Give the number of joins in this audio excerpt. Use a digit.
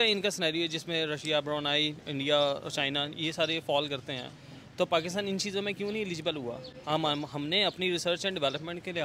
0